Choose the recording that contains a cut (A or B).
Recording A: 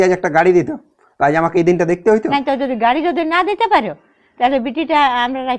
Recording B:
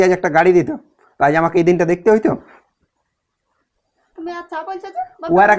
A